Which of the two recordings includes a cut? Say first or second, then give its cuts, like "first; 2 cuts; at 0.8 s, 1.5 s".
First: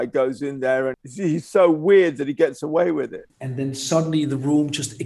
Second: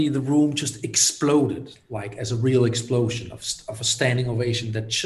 first; 2 cuts; at 1.0 s, 3.2 s